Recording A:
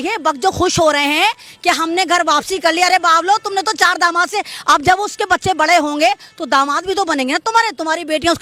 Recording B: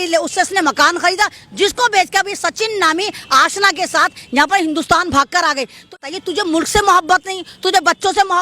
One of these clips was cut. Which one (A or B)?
B